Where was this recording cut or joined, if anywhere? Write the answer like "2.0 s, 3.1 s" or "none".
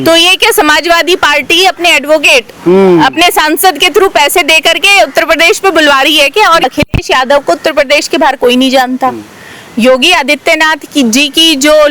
6.6 s

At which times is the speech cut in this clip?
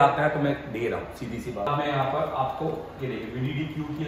1.7 s

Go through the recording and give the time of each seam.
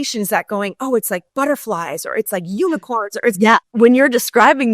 3.5 s

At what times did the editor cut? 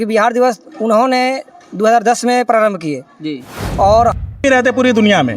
4.2 s

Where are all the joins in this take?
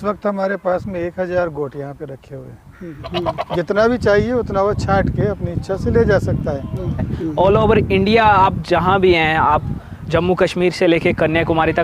3.0 s, 7.1 s

